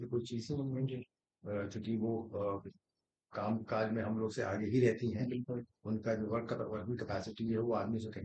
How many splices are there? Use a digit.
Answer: 0